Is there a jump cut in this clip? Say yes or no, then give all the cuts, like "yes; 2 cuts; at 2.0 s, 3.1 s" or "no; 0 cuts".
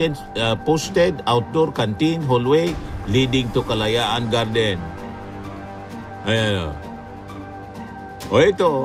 no; 0 cuts